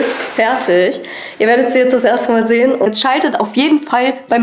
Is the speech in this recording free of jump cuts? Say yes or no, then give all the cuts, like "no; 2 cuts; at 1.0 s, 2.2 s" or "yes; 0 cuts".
no; 1 cut; at 2.9 s